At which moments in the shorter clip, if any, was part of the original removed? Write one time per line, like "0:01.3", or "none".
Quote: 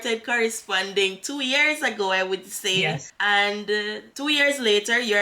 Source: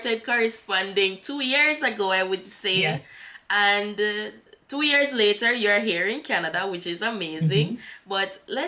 0:03.1
0:04.0